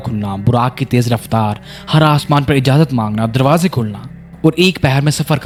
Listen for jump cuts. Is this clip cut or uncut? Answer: uncut